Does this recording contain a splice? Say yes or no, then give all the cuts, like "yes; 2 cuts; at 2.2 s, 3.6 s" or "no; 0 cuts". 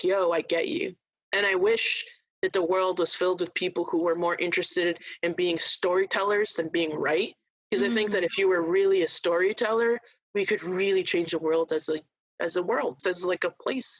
yes; 1 cut; at 13.0 s